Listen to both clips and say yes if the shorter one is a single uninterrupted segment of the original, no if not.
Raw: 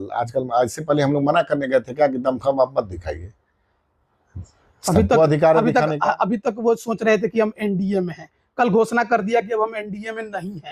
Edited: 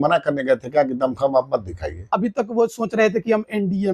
no